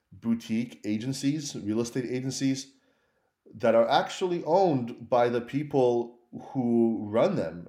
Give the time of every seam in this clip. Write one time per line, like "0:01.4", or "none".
none